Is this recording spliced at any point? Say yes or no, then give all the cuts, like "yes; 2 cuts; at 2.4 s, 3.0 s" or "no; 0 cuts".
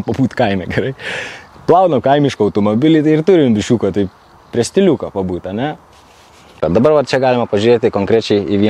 yes; 1 cut; at 6.6 s